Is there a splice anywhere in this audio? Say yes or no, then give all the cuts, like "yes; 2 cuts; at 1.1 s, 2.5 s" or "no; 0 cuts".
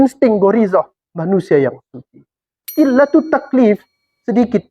yes; 1 cut; at 2.7 s